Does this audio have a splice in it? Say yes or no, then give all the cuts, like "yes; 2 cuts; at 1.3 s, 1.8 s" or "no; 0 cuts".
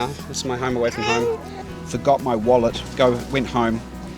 yes; 1 cut; at 1.5 s